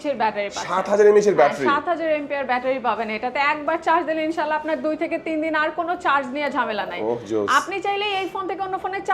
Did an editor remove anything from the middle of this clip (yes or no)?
no